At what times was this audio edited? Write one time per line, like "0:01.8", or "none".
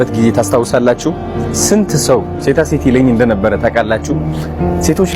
none